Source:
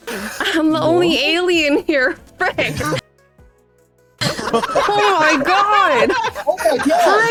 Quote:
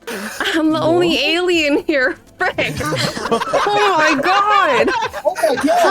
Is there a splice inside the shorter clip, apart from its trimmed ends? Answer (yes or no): yes